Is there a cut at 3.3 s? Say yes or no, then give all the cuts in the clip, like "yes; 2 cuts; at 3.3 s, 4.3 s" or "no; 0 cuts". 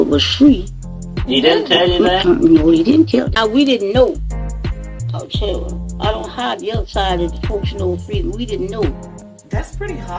yes; 1 cut; at 3.3 s